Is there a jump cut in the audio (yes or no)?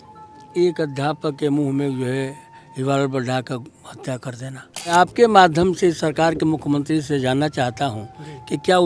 yes